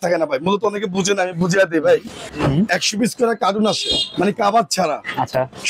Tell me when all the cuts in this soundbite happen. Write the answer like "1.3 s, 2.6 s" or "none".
2.2 s

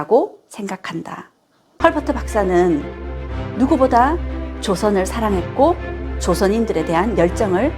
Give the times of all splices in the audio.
1.7 s

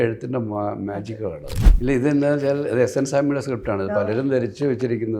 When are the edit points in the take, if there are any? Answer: 1.7 s

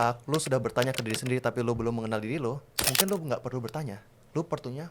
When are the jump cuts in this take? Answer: none

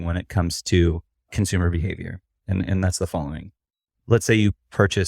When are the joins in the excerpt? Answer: 1.2 s

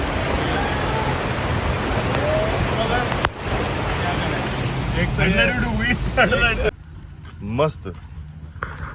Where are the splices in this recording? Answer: none

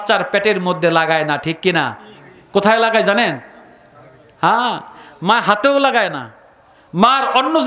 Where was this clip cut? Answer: none

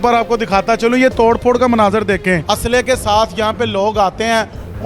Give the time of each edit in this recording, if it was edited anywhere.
2.5 s

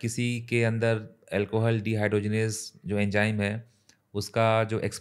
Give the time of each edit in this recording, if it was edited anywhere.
none

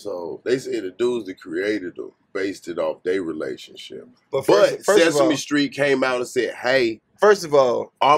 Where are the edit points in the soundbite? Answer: none

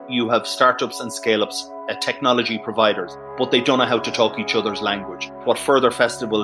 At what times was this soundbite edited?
3.1 s, 5.4 s

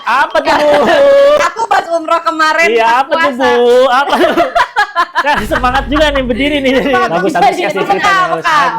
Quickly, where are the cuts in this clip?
7.1 s

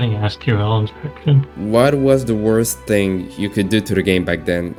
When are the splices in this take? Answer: none

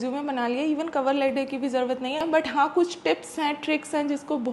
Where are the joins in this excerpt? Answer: 2.2 s

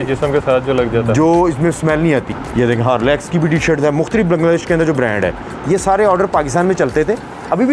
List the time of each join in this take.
2.4 s

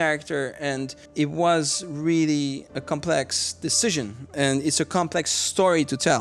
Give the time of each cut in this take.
1.0 s, 2.6 s, 4.3 s

